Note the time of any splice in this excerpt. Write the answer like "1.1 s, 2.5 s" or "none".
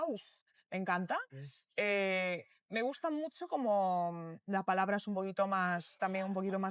none